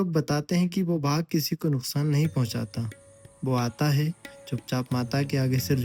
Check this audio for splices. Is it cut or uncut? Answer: uncut